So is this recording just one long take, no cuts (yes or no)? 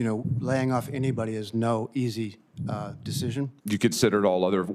no